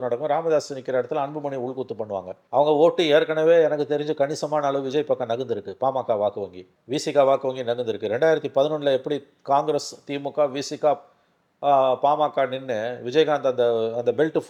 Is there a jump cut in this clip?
no; 0 cuts

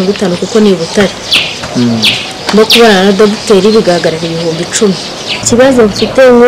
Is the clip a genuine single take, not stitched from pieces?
no; 1 cut; at 5.4 s

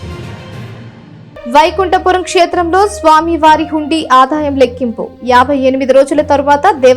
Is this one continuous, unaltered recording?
no; 1 cut; at 0.9 s

